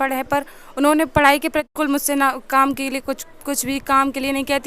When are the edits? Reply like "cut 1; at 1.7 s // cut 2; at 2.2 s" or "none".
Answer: cut 1; at 1.7 s